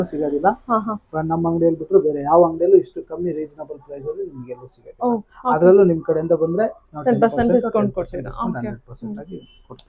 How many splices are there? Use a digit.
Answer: 0